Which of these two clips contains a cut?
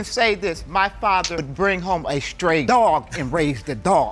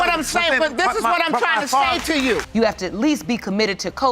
second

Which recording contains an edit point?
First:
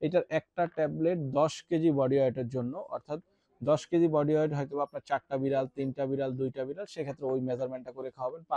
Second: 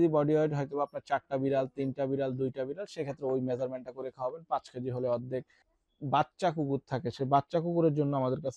second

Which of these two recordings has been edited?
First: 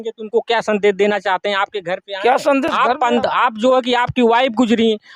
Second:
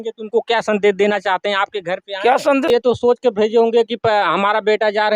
second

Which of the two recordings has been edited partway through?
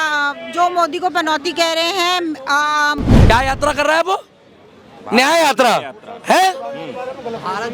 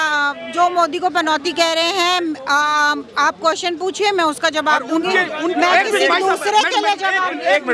first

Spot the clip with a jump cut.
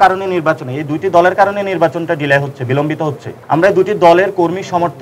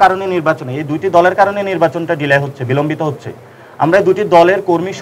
first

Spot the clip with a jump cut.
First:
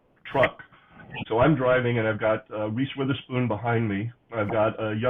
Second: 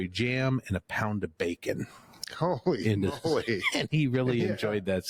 first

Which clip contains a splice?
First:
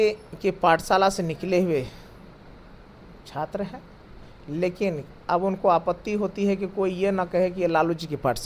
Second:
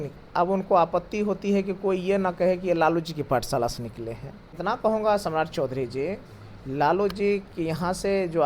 second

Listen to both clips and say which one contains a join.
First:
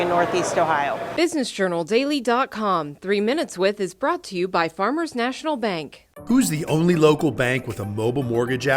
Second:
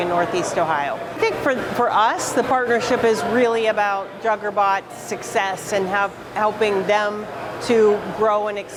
first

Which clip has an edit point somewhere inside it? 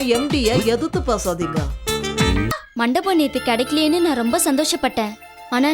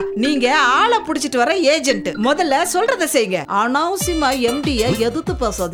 first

